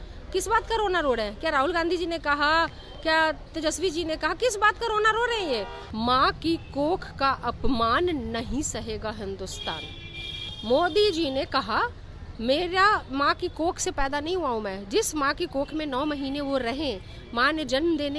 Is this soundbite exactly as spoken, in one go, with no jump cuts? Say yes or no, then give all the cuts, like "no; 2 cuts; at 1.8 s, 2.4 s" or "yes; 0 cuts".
no; 2 cuts; at 5.8 s, 10.6 s